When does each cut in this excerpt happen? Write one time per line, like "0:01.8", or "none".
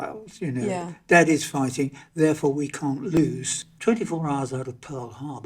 0:03.2